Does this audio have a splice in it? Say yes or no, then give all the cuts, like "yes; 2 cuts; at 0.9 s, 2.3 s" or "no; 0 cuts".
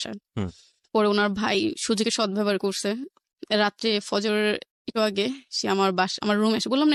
no; 0 cuts